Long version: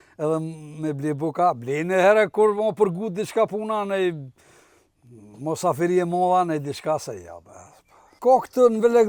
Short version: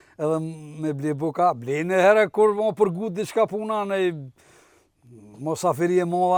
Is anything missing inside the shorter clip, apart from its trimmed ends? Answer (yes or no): no